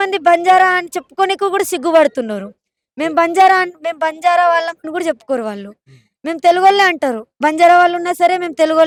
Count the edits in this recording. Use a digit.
0